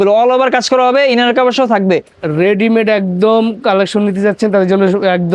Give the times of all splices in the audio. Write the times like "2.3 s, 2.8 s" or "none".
2.2 s